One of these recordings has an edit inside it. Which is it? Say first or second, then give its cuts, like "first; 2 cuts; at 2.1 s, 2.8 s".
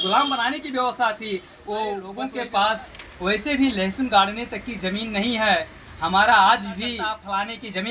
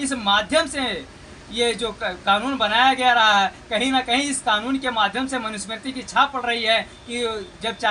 first; 2 cuts; at 2.2 s, 7.0 s